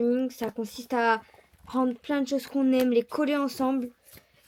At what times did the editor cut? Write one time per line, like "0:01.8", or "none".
none